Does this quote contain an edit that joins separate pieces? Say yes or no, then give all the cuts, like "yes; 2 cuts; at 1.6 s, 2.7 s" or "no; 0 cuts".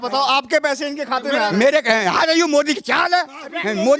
no; 0 cuts